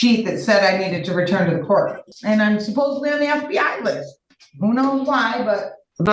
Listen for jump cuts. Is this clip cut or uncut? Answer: cut